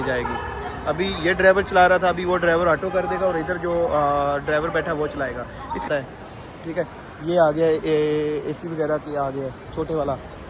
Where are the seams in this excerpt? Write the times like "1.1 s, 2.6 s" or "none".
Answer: 5.8 s

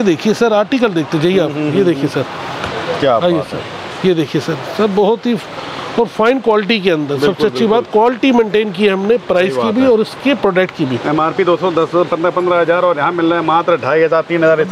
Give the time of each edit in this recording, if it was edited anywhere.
none

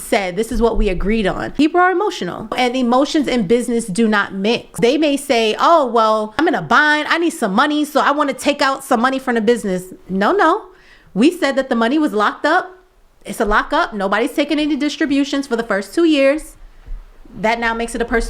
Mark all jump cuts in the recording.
1.5 s, 2.5 s, 4.8 s, 6.3 s

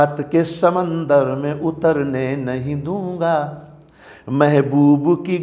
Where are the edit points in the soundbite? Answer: none

